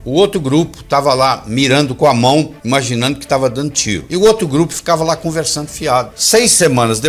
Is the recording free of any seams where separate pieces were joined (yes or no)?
no